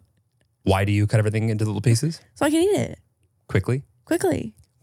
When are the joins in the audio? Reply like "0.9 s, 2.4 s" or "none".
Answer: none